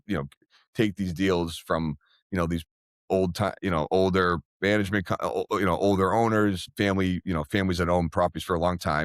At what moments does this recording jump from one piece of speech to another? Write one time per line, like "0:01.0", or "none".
0:06.7